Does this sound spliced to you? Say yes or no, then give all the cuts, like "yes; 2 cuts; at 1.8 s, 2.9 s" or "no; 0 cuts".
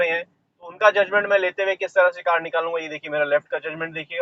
no; 0 cuts